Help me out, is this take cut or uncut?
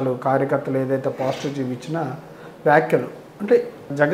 uncut